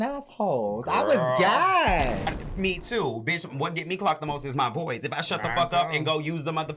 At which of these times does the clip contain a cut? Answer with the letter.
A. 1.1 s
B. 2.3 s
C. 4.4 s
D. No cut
B